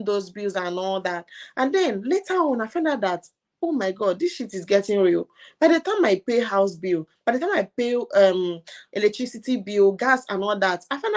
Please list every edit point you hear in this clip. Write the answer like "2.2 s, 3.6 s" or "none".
none